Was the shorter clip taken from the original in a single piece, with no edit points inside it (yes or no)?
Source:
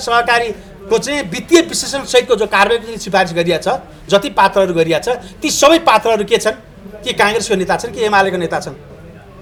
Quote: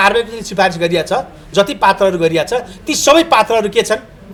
yes